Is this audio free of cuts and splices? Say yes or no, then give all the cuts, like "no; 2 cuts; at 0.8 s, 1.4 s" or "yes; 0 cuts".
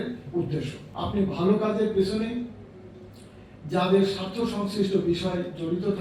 yes; 0 cuts